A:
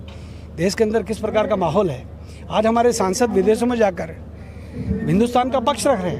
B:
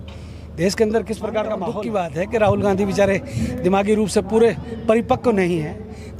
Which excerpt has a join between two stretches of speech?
B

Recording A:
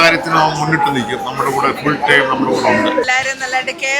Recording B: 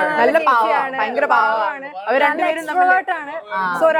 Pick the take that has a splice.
A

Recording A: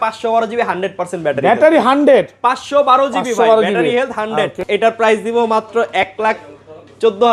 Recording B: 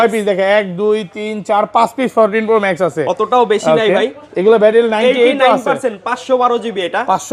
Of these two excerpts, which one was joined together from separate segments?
A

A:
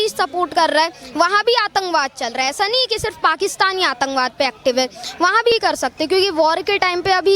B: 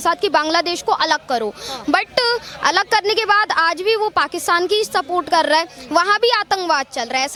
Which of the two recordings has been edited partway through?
A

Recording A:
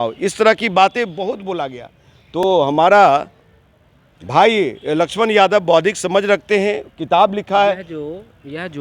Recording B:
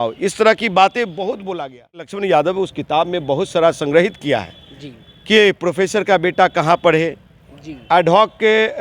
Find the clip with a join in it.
B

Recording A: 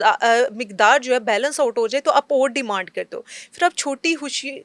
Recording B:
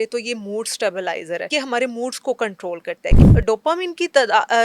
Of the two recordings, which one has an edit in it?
B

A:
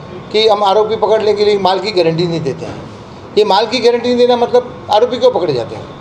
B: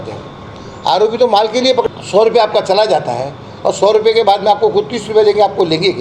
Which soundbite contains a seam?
B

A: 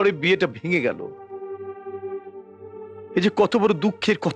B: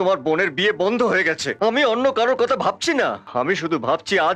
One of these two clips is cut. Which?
B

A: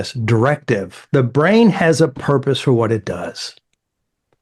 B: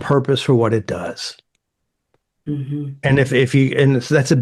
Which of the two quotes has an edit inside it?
A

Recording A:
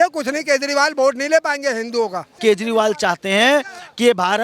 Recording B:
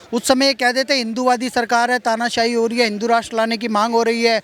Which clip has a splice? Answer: A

